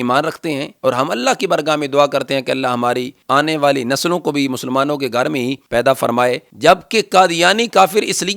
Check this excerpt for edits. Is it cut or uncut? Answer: cut